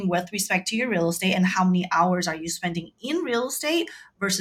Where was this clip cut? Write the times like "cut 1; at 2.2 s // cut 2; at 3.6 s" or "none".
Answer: none